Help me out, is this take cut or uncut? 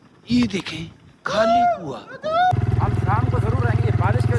cut